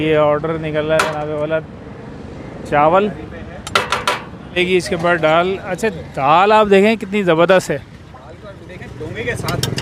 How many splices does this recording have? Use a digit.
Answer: 1